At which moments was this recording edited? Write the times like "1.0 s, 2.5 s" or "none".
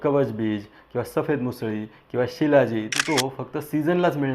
2.9 s